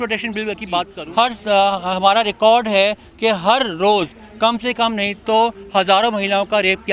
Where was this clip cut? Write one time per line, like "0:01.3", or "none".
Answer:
0:01.0